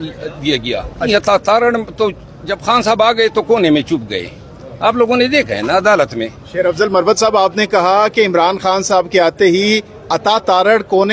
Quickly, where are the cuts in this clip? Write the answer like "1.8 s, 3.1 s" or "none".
1.1 s, 6.4 s